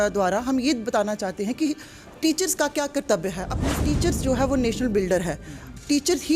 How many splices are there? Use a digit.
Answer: 1